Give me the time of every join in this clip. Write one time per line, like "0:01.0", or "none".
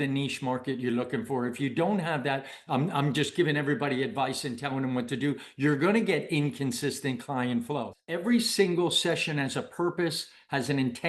0:08.0